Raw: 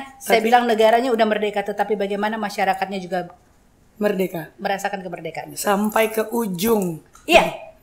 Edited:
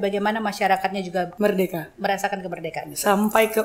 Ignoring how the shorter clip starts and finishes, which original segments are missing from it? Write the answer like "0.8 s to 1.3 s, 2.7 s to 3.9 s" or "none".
3.3 s to 3.9 s